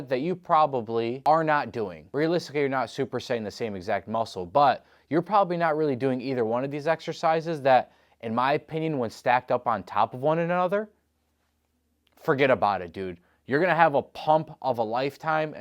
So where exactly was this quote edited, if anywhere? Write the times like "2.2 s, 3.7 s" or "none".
1.2 s, 2.0 s